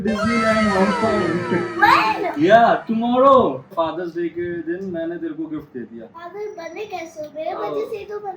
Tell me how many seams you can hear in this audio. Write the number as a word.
two